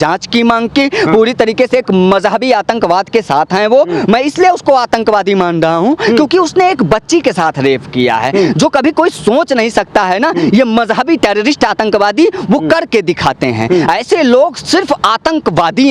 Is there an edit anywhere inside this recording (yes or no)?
no